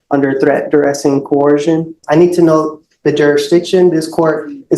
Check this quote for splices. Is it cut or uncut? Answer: cut